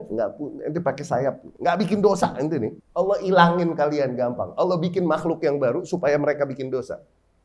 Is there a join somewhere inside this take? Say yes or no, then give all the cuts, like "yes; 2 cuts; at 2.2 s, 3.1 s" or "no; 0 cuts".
yes; 2 cuts; at 1.5 s, 2.8 s